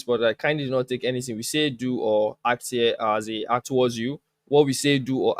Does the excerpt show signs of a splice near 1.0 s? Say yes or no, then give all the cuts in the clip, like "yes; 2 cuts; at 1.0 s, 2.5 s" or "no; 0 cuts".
no; 1 cut; at 3.6 s